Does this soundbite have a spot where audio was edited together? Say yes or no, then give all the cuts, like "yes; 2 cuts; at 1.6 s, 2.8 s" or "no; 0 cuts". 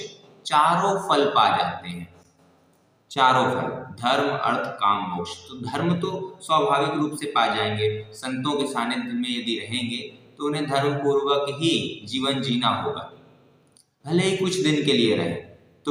no; 0 cuts